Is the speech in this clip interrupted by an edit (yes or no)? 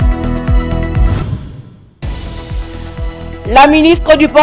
yes